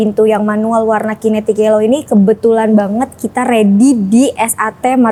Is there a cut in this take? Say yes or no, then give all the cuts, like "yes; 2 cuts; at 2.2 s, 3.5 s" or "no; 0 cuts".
no; 0 cuts